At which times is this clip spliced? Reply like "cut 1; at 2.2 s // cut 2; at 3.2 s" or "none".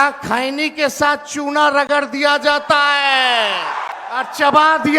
cut 1; at 3.9 s